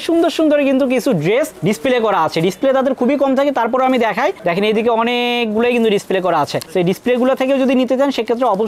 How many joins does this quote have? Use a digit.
0